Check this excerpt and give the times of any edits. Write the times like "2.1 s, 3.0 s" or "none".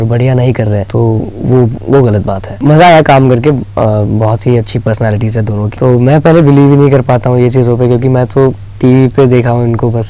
0.9 s, 2.5 s, 5.7 s